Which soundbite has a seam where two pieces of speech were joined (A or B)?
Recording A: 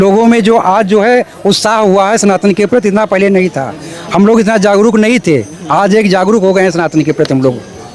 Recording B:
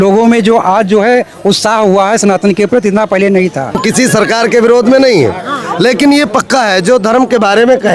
B